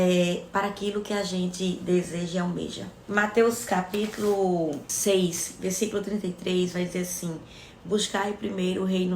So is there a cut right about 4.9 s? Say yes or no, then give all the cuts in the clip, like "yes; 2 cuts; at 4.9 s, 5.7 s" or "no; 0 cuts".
yes; 1 cut; at 4.9 s